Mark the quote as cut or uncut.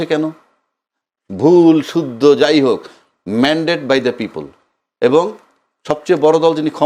uncut